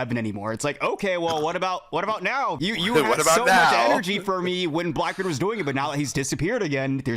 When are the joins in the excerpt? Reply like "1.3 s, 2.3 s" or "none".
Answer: 2.6 s

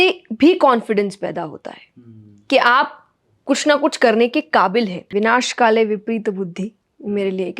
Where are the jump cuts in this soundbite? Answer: 5.1 s

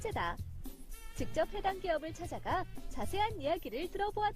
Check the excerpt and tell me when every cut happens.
none

